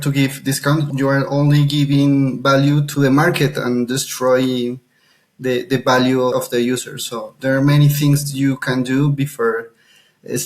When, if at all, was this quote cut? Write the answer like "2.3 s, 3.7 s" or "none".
0.9 s, 2.9 s, 6.3 s

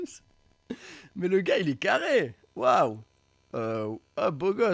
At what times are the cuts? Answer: none

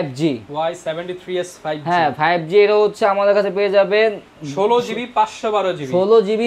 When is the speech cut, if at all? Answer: none

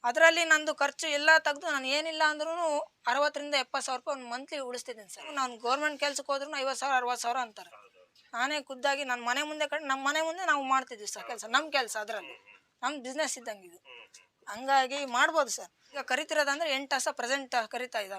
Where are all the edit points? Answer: 5.3 s, 16.0 s

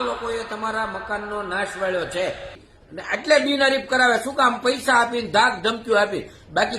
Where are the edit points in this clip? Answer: 2.7 s

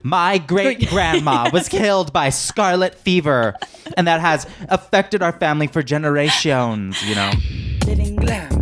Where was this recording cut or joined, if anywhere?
7.4 s

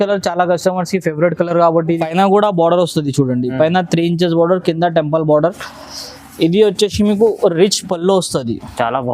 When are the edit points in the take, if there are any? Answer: 2.0 s

